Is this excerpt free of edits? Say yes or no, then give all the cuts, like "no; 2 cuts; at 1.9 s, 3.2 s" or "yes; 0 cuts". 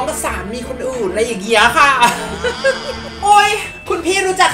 no; 1 cut; at 3.0 s